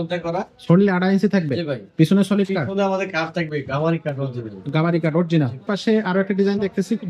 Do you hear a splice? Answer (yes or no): yes